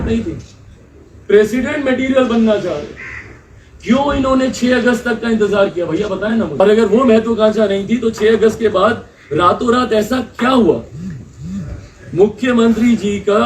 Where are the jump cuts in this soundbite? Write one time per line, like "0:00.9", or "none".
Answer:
0:06.6